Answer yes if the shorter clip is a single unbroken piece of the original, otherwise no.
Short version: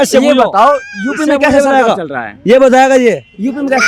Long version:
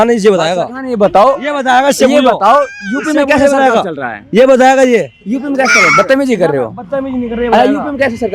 yes